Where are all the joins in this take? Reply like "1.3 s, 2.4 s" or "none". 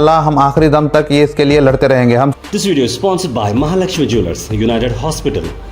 2.3 s